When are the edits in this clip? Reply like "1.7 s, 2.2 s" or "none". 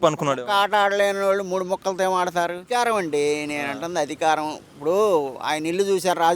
2.6 s